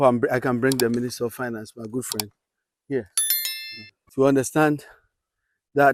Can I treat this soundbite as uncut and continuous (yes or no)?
yes